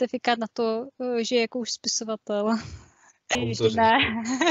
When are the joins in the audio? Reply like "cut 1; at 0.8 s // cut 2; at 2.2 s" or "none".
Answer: cut 1; at 3.4 s